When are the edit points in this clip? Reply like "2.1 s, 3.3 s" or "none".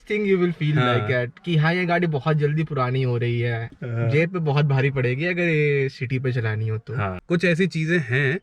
3.7 s, 7.2 s